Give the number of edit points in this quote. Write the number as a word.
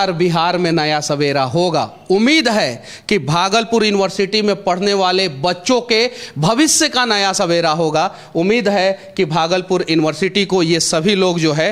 zero